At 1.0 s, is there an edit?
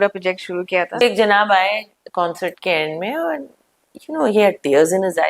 yes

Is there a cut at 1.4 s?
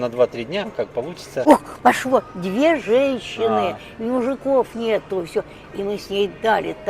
yes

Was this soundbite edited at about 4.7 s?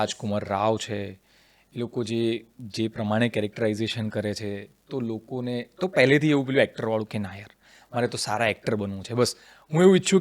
no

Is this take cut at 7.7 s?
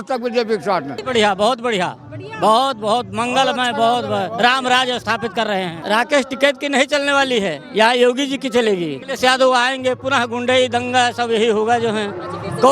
no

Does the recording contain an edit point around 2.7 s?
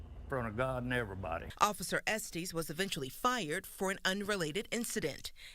no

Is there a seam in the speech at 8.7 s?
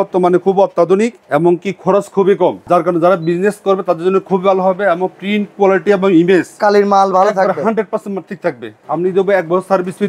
yes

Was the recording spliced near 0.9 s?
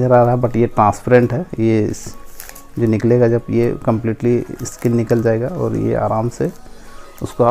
no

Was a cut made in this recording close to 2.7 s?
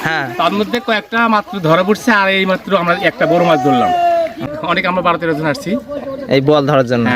no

